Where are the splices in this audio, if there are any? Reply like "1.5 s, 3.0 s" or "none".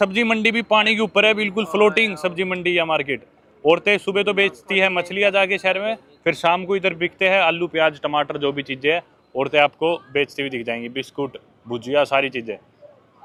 none